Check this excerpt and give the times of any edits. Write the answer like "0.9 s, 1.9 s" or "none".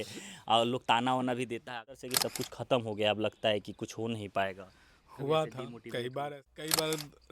2.1 s, 6.3 s